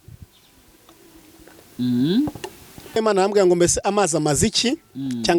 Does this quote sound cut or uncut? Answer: cut